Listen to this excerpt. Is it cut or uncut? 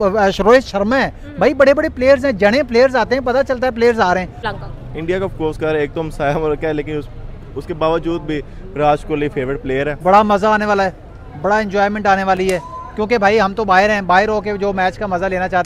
cut